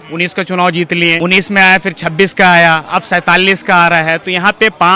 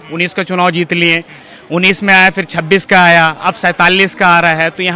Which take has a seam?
first; 1 cut; at 1.2 s

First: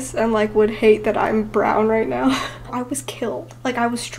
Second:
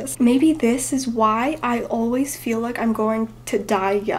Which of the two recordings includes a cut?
first; 1 cut; at 2.7 s

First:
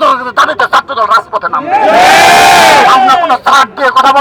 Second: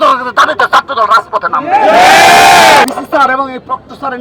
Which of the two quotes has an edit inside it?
second; 1 cut; at 2.8 s

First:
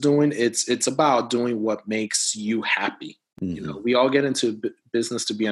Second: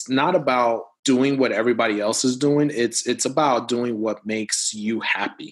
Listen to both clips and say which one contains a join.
second; 1 cut; at 0.9 s

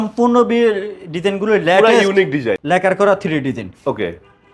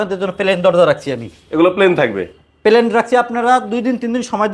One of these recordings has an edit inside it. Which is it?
first; 1 cut; at 2.6 s

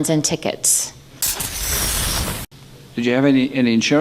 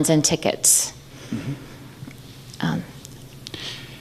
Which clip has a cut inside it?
first; 2 cuts; at 1.1 s, 2.5 s

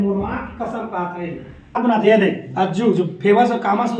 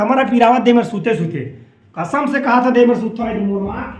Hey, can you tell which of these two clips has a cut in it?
first; 1 cut; at 1.8 s

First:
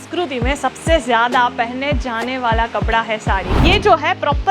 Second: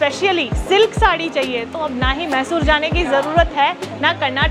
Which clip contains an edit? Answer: first; 1 cut; at 3.6 s

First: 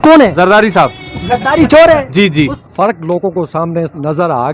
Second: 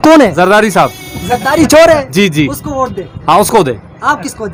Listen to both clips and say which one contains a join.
first; 1 cut; at 2.6 s

